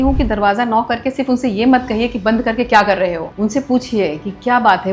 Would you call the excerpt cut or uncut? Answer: cut